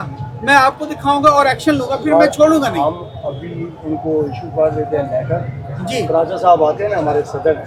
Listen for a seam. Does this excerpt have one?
no; 0 cuts

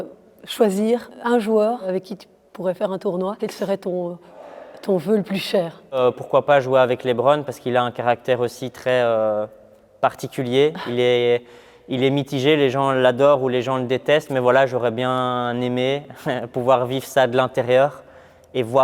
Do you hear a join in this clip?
yes; 4 cuts; at 1.1 s, 1.8 s, 3.4 s, 6.0 s

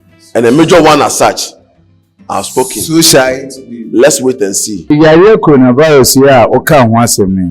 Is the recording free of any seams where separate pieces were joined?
no; 1 cut; at 4.9 s

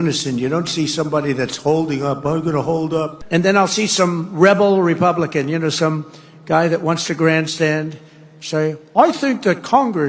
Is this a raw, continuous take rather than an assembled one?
no; 1 cut; at 3.2 s

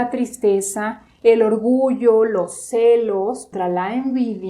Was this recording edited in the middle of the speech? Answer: yes; 1 cut; at 3.5 s

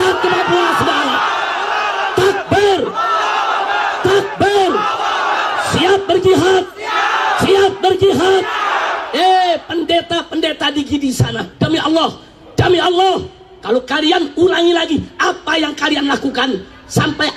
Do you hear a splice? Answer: no; 0 cuts

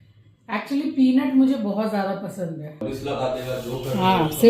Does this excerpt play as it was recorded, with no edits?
no; 1 cut; at 2.8 s

